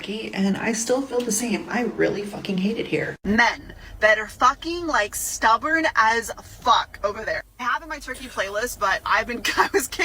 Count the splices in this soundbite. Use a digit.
1